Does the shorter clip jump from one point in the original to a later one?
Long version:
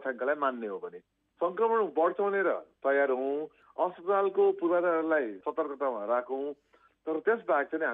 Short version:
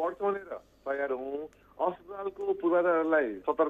no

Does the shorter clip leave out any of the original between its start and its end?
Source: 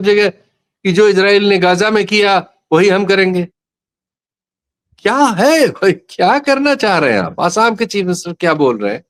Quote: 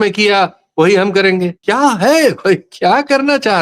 yes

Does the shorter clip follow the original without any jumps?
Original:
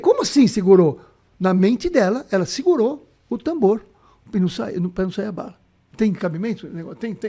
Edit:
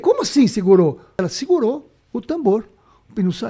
no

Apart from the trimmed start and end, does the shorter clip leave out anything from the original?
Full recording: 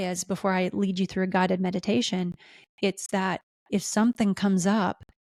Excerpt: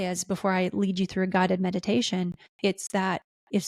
yes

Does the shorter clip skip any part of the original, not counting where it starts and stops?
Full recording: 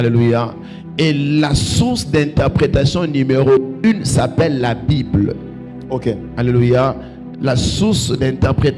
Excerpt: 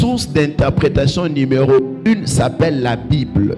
no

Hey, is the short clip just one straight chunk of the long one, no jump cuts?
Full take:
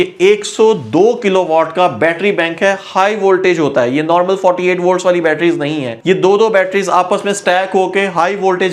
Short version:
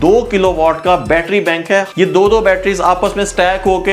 no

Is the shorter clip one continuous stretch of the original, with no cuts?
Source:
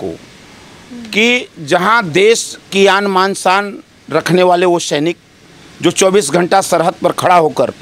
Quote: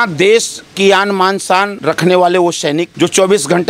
no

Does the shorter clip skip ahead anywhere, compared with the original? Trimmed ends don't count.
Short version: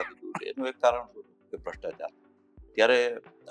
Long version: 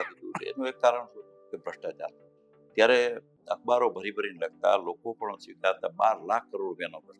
no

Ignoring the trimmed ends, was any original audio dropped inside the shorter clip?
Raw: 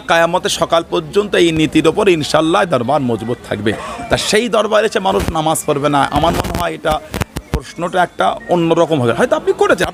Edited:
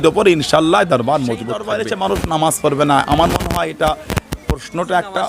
yes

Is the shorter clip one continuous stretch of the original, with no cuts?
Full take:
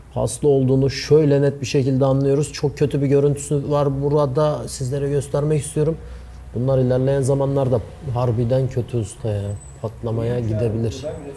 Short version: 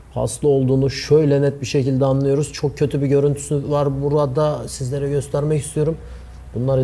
yes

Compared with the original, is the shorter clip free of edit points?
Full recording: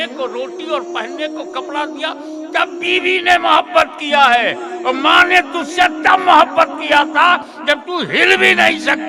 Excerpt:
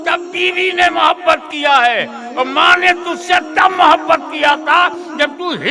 yes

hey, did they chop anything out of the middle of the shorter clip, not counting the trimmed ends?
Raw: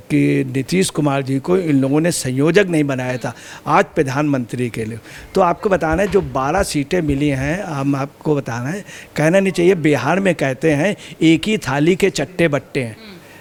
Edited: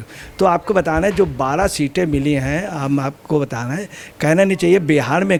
no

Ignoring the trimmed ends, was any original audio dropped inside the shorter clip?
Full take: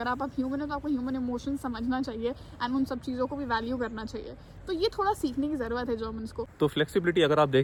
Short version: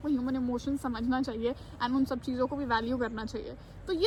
no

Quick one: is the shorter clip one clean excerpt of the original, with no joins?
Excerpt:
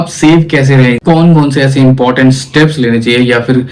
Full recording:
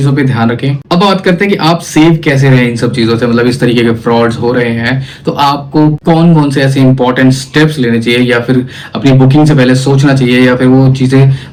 no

